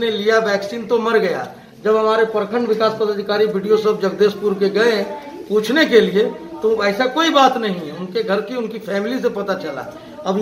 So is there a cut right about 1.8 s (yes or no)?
no